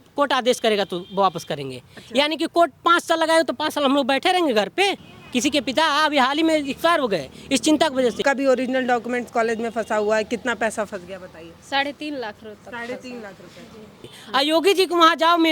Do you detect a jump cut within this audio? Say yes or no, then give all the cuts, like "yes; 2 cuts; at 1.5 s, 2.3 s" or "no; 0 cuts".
yes; 3 cuts; at 5.1 s, 8.2 s, 14.1 s